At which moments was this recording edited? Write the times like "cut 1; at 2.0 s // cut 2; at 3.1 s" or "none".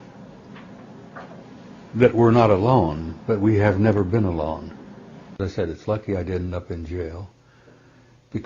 cut 1; at 5.4 s